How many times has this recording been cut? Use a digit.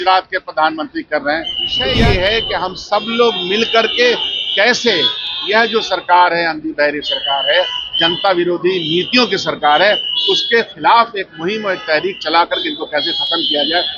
1